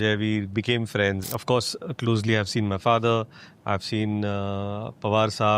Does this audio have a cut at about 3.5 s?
no; 1 cut; at 1.2 s

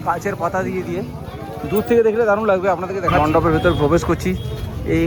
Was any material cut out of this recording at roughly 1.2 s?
no; 1 cut; at 3.2 s

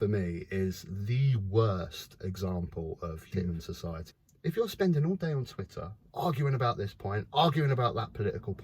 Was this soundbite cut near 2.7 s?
no; 1 cut; at 4.0 s

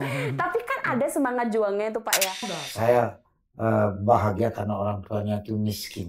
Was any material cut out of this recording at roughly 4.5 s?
no; 1 cut; at 2.3 s

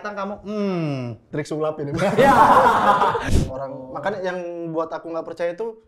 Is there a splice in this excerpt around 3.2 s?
yes; 1 cut; at 3.2 s

